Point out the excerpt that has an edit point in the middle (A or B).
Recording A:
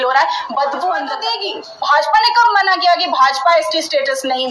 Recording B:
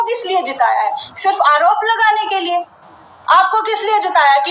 A